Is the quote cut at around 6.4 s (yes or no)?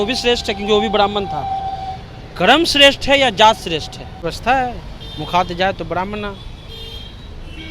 no